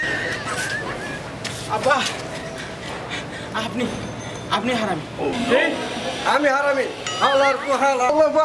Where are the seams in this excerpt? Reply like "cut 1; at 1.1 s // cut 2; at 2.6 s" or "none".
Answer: none